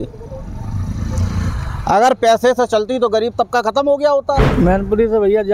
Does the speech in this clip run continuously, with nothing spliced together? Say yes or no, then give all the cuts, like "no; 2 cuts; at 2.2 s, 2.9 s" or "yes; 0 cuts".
no; 1 cut; at 4.5 s